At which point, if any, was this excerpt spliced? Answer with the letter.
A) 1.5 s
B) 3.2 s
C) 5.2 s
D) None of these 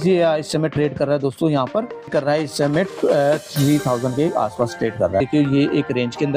C